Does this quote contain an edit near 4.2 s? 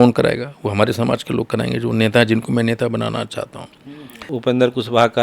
yes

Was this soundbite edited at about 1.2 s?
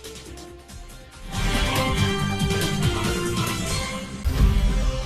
no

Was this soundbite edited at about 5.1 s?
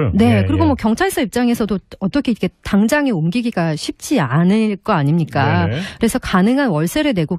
yes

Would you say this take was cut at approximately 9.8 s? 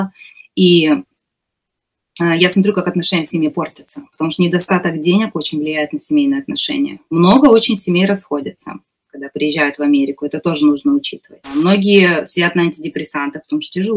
no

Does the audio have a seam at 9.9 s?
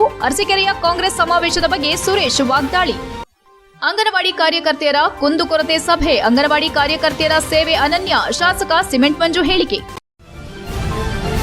yes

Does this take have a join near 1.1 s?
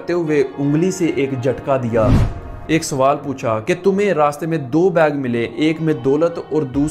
no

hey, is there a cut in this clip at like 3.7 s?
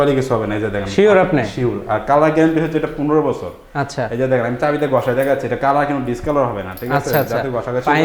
no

